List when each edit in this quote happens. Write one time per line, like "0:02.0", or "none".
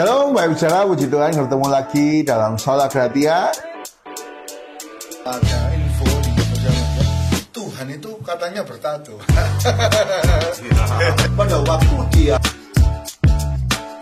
none